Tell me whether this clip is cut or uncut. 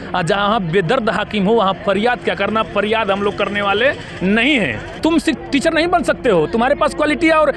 cut